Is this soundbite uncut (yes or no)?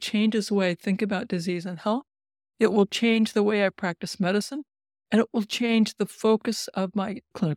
yes